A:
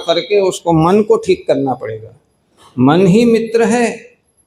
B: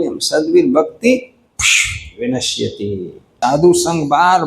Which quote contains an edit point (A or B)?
B